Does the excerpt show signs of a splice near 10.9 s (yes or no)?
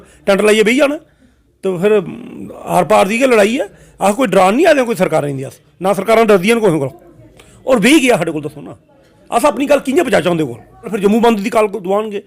yes